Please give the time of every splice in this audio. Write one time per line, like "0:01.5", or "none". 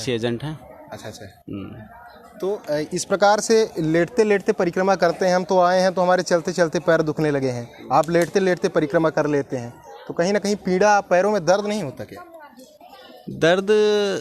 none